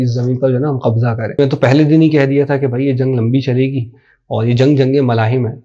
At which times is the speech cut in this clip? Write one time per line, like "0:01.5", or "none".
0:01.4

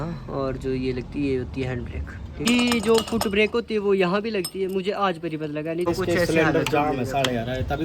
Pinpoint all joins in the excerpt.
0:02.4
0:05.9

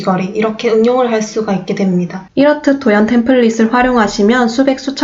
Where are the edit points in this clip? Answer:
0:02.2

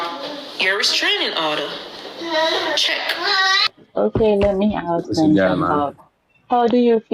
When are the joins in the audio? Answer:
0:03.7

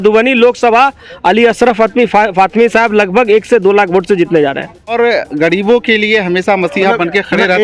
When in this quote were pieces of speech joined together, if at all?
0:04.9

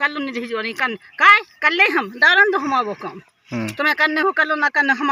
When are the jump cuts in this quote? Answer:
none

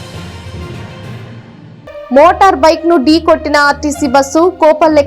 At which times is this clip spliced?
none

